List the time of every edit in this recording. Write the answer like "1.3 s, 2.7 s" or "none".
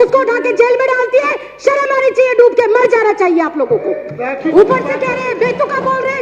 4.5 s

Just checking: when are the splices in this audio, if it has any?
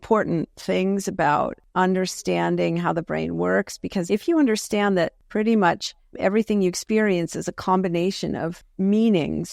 1.6 s, 4.0 s, 5.2 s, 8.6 s

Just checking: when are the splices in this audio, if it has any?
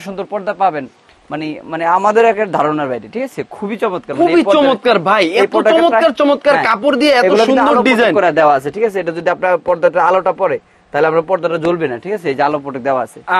none

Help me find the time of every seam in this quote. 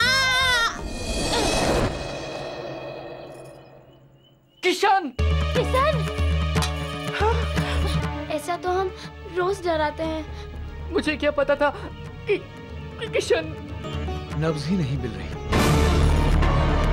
8.0 s, 13.9 s

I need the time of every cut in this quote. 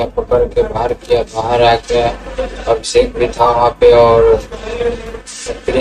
none

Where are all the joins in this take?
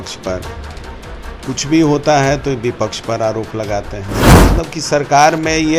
4.5 s

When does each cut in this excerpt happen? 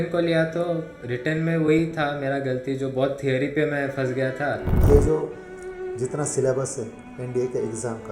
4.8 s

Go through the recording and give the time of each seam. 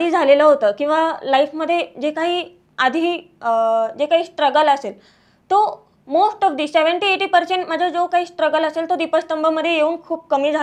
none

